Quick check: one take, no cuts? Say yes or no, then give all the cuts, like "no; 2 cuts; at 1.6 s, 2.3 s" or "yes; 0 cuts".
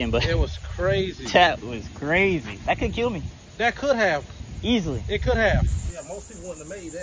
no; 2 cuts; at 2.5 s, 5.8 s